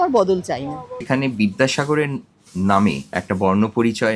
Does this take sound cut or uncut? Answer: cut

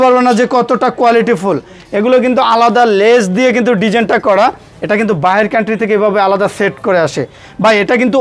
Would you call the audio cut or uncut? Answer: uncut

